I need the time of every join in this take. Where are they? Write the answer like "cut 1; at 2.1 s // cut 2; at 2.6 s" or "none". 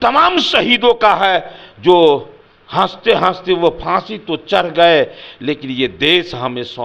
none